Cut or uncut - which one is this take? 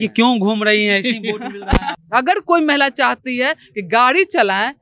cut